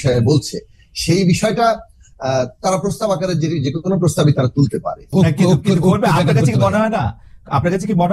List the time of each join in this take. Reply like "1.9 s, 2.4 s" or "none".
5.1 s